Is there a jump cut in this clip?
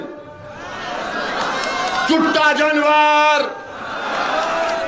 no; 0 cuts

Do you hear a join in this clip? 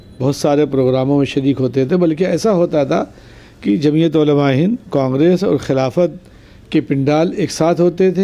no; 0 cuts

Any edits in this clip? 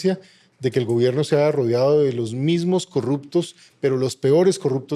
no; 0 cuts

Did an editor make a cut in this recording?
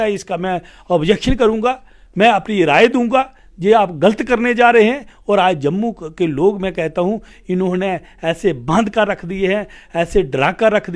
no; 0 cuts

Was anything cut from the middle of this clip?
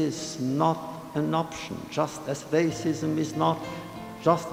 no; 0 cuts

